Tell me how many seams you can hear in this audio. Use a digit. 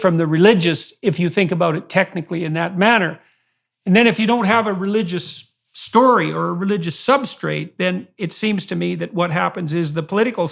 0